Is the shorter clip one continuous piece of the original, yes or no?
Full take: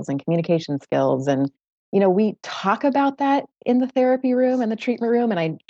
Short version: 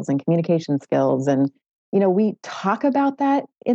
yes